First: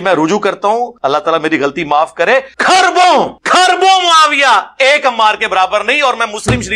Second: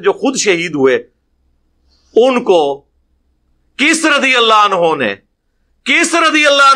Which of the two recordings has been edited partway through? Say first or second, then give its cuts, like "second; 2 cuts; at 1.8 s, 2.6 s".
first; 3 cuts; at 0.9 s, 2.5 s, 3.4 s